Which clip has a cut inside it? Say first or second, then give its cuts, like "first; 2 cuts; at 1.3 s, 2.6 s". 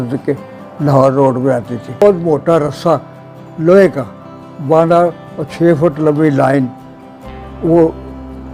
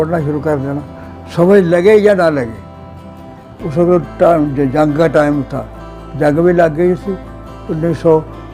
first; 1 cut; at 2.0 s